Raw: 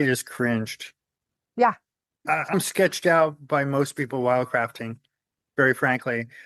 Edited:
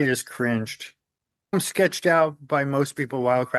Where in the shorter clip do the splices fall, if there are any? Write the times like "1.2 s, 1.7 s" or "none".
1.4 s